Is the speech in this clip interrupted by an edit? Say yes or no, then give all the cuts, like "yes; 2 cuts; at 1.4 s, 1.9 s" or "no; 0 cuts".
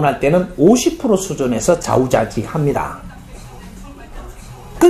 no; 0 cuts